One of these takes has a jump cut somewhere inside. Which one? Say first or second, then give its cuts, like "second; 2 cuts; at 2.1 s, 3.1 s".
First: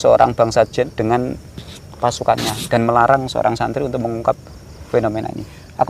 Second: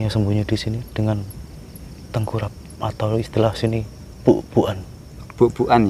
first; 1 cut; at 0.9 s